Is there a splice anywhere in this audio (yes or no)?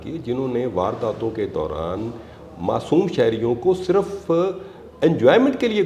no